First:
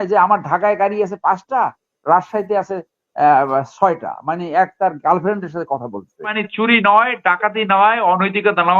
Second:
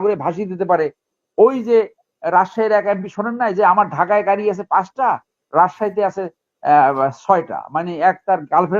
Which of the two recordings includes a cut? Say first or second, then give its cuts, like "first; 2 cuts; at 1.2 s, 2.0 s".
first; 1 cut; at 6.4 s